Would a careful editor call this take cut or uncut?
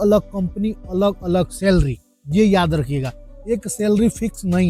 uncut